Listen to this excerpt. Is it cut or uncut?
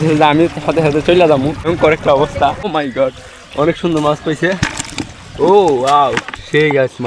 cut